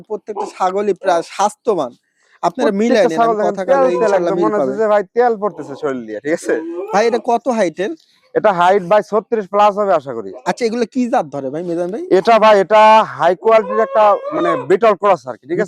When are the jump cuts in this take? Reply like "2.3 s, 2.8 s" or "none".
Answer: none